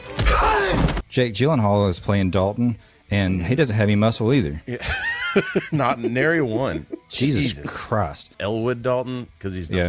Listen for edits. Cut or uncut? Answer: cut